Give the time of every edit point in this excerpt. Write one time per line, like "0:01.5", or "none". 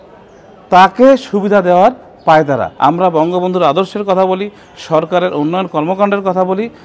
0:02.7